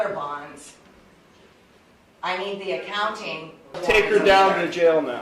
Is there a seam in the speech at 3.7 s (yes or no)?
yes